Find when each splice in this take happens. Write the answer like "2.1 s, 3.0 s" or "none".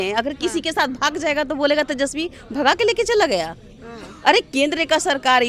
none